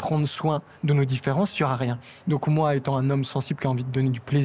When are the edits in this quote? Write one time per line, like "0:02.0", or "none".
none